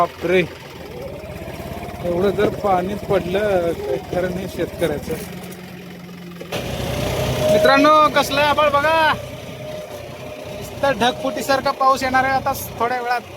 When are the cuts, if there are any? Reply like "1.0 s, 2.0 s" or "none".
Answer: 6.6 s